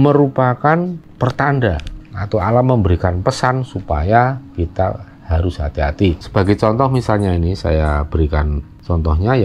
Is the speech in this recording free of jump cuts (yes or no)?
yes